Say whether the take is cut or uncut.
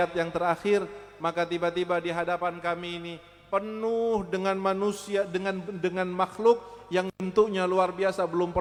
uncut